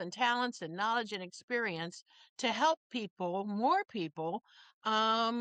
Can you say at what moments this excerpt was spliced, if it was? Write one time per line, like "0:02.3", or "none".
none